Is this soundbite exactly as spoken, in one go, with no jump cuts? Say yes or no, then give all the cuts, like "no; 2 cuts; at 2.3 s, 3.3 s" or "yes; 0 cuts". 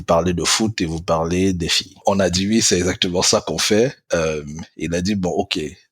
no; 1 cut; at 2.0 s